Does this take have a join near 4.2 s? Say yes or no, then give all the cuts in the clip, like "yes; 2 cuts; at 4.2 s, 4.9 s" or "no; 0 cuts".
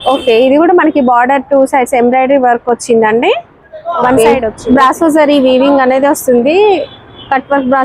yes; 1 cut; at 4.2 s